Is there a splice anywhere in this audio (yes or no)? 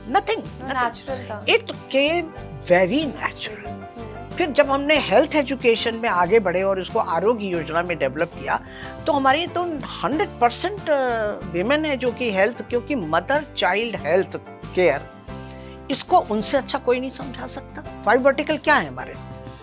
no